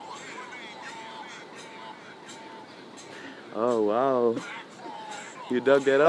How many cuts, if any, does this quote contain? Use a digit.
0